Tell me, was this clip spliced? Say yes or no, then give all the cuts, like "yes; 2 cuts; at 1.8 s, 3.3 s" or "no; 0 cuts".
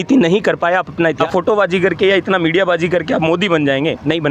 yes; 1 cut; at 1.2 s